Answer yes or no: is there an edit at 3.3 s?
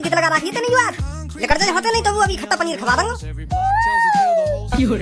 yes